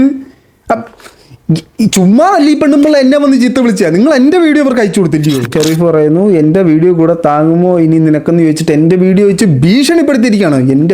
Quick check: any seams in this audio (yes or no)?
yes